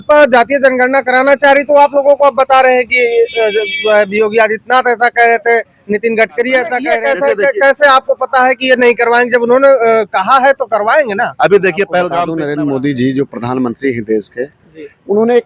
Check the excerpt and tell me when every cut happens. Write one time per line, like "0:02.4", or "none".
0:06.9
0:12.3